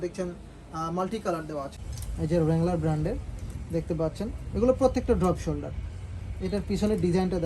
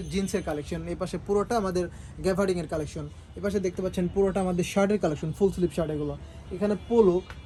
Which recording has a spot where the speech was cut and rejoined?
first; 1 cut; at 1.8 s

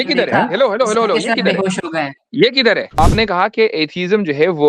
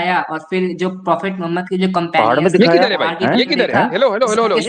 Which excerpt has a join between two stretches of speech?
first; 1 cut; at 3.0 s

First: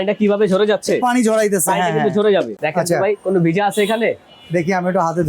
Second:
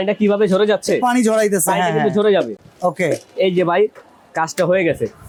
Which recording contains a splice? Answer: first; 1 cut; at 2.6 s

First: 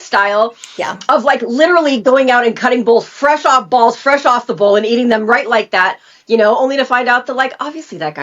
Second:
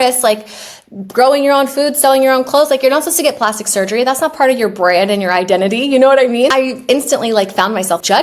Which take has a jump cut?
second; 1 cut; at 6.5 s

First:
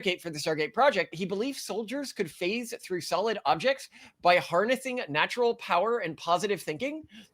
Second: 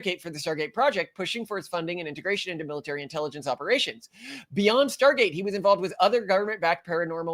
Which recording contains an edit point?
first; 1 cut; at 1.1 s

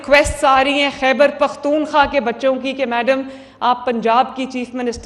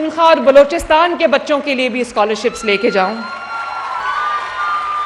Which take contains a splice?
second; 1 cut; at 4.0 s

